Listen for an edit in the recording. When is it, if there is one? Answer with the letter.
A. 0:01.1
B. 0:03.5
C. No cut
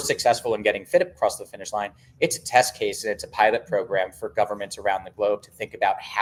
C